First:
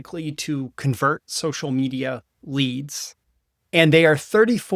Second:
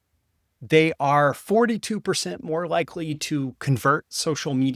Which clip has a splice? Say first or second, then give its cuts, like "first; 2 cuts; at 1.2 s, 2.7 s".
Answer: first; 1 cut; at 3.2 s